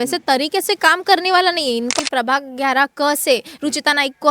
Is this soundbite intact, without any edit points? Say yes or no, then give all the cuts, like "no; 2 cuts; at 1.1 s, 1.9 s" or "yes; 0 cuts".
no; 1 cut; at 1.9 s